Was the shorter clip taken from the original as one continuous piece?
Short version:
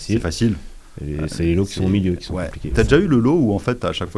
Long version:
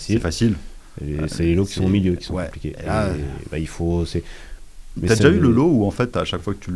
no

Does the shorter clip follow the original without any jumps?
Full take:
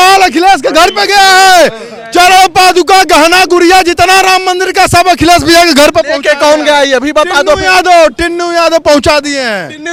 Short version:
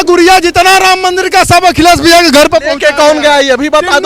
yes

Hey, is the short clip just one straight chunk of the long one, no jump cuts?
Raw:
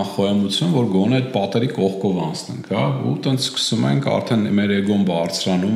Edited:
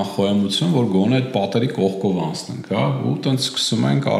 yes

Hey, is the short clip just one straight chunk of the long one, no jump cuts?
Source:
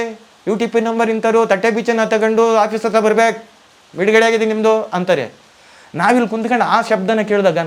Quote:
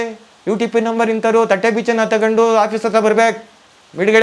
yes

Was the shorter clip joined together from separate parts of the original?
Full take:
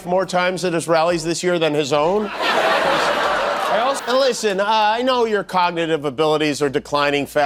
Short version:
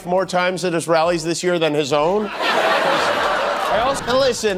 no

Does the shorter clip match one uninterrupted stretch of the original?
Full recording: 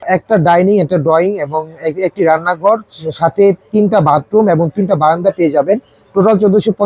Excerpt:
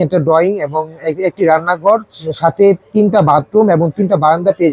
yes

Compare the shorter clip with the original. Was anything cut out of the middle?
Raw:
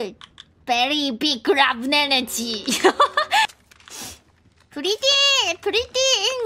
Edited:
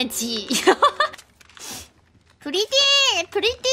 yes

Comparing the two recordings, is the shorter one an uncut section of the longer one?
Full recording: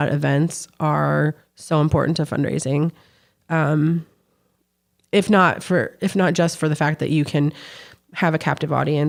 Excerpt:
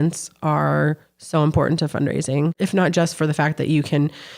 no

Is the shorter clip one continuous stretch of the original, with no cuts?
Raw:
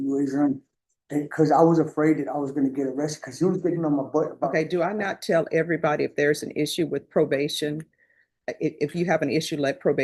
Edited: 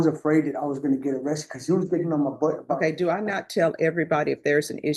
yes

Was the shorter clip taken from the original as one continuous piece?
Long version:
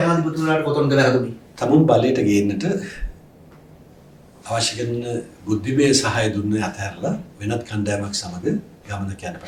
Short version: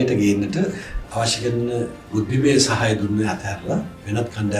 no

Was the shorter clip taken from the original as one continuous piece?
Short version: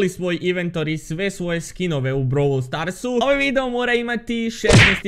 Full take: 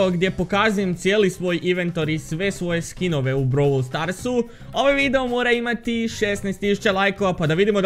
no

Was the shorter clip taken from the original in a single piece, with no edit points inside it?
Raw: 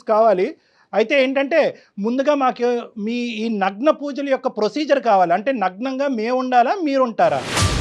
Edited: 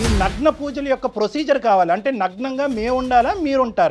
yes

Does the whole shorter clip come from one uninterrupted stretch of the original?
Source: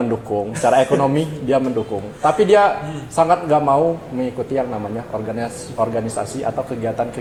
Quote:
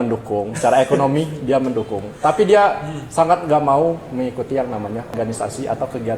no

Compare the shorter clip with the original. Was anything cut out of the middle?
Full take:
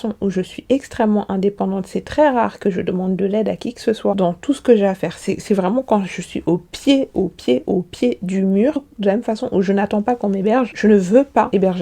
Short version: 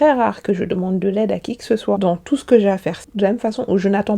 yes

